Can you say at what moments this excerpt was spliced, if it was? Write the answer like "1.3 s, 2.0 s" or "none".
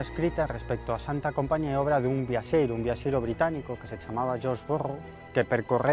none